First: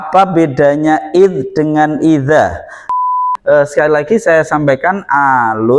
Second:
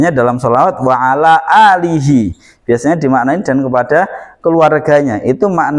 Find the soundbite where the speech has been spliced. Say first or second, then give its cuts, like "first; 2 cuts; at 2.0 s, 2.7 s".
first; 1 cut; at 3.0 s